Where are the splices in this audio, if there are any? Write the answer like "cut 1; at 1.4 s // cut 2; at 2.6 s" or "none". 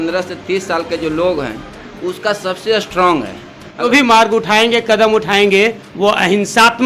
cut 1; at 3.9 s